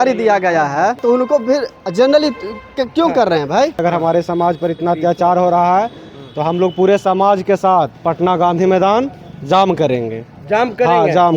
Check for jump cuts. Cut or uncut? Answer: cut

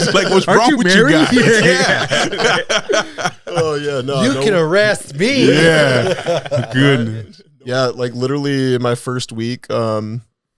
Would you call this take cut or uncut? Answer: cut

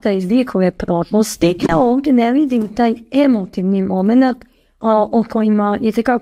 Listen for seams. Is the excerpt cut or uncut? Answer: cut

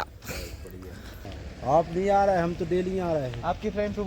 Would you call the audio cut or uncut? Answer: cut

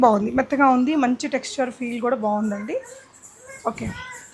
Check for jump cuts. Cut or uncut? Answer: uncut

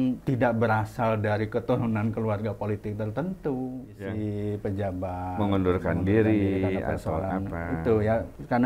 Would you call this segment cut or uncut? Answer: cut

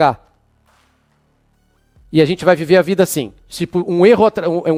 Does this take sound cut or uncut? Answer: uncut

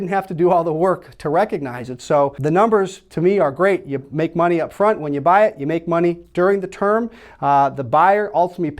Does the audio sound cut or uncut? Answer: cut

